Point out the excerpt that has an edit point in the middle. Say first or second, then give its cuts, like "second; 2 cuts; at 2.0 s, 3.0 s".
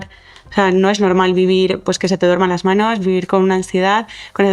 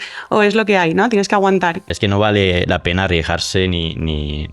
second; 1 cut; at 1.9 s